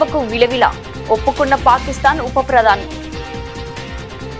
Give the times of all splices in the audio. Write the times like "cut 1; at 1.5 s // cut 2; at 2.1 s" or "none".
cut 1; at 2.8 s